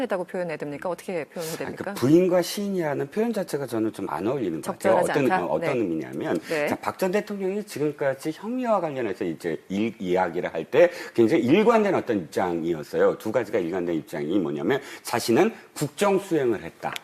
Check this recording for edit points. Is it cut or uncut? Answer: cut